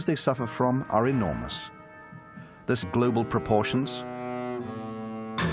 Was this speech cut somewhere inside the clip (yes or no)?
no